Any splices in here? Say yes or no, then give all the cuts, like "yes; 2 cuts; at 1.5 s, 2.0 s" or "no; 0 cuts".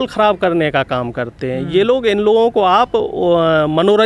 no; 0 cuts